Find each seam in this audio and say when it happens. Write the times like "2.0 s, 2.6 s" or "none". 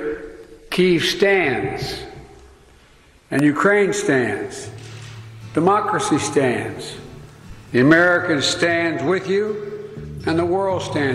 none